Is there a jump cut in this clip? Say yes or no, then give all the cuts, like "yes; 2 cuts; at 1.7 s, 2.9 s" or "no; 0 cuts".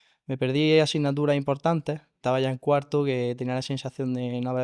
yes; 1 cut; at 2.1 s